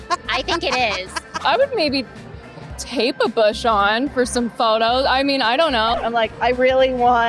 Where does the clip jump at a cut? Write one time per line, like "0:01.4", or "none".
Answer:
0:01.3
0:05.9